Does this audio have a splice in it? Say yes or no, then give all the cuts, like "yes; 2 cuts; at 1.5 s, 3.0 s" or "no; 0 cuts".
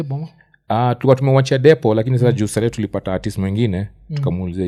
no; 0 cuts